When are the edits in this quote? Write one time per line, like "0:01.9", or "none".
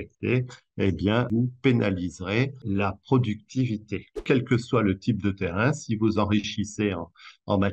0:01.3
0:02.6
0:04.2

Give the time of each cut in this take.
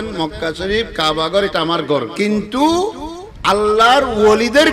0:02.1

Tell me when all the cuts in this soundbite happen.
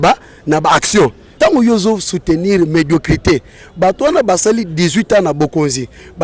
0:01.3

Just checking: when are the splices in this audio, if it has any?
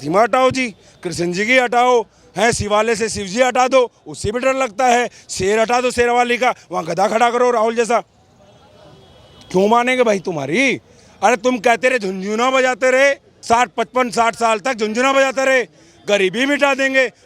none

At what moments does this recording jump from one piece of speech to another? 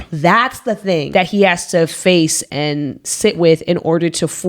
0:01.1
0:02.4

